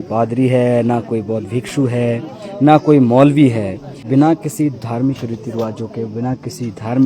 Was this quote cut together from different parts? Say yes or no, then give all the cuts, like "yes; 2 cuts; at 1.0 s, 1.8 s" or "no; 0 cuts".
yes; 1 cut; at 4.0 s